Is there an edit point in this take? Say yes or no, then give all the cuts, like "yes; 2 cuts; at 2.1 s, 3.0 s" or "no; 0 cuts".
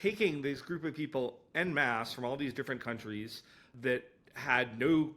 yes; 1 cut; at 3.7 s